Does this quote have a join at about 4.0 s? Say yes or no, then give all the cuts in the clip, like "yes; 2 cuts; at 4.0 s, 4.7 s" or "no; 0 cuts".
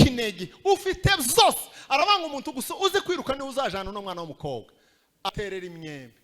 no; 1 cut; at 5.3 s